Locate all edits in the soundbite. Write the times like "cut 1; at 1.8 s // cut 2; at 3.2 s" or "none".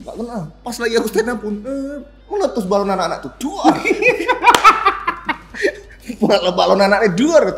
none

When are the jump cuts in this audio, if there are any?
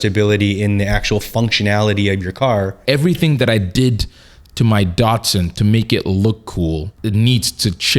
cut 1; at 2.8 s // cut 2; at 6.9 s

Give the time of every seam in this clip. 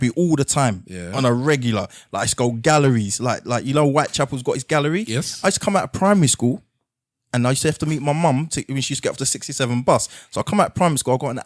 none

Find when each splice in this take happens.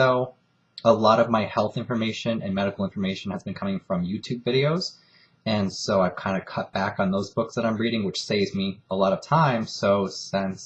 cut 1; at 1.1 s

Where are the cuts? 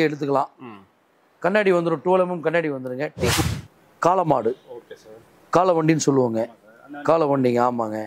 cut 1; at 3.4 s

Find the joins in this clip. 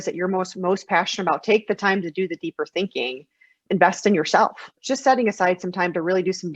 cut 1; at 3.5 s // cut 2; at 4.8 s

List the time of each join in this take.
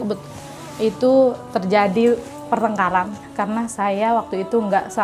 cut 1; at 3.2 s

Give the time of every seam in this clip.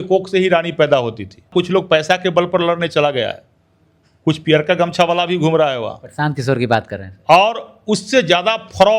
cut 1; at 1.5 s

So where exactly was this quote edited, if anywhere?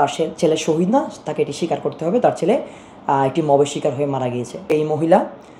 cut 1; at 4.7 s

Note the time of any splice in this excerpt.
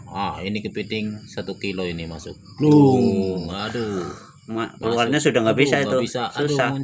none

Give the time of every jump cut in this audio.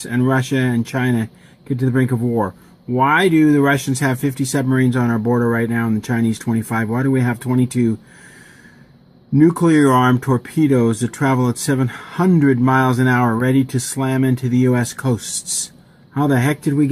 cut 1; at 3.0 s

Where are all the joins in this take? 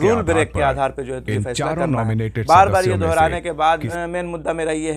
cut 1; at 3.9 s

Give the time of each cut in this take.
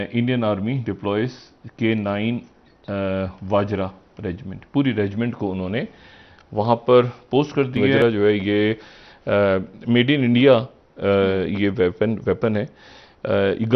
cut 1; at 7.9 s

